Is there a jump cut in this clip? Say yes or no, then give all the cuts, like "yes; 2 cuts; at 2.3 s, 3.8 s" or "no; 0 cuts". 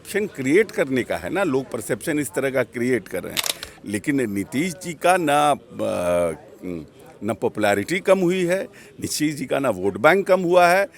no; 0 cuts